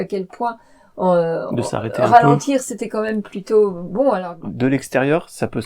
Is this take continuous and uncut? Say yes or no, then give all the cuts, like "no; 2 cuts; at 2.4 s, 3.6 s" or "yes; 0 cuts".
no; 1 cut; at 4.3 s